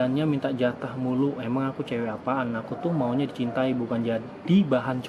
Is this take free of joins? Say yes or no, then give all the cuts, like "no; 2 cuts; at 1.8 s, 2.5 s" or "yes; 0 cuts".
yes; 0 cuts